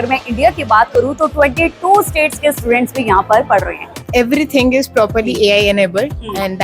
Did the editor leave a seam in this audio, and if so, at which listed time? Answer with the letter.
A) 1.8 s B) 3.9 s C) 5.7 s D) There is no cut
B